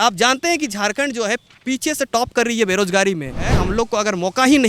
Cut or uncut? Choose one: cut